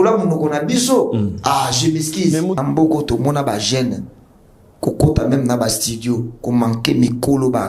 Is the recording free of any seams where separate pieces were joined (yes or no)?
no